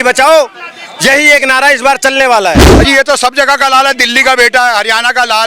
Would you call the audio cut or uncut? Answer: cut